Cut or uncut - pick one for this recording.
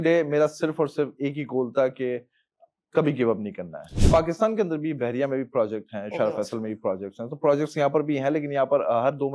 cut